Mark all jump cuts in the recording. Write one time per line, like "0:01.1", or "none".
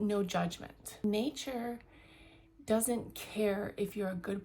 0:01.0